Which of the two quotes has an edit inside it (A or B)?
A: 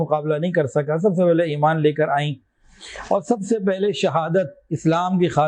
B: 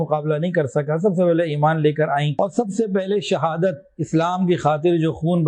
B